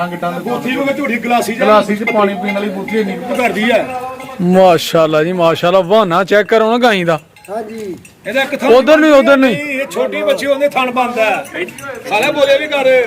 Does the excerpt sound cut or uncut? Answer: cut